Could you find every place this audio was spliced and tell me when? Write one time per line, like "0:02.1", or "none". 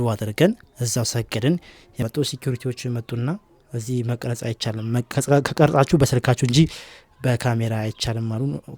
0:02.0